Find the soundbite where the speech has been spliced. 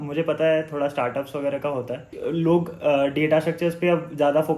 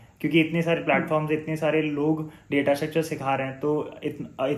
first; 1 cut; at 2.1 s

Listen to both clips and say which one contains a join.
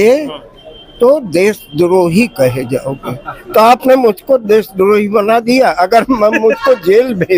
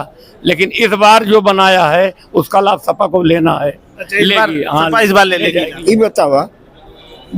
second; 1 cut; at 5.7 s

